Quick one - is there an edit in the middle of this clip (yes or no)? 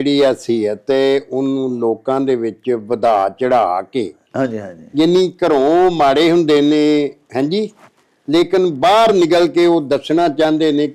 no